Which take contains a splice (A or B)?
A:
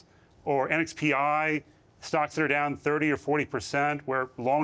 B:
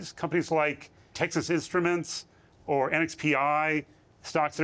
B